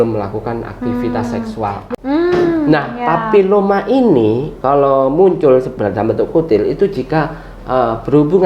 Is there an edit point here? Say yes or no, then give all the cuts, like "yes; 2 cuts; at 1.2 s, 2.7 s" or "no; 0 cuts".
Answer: yes; 1 cut; at 1.8 s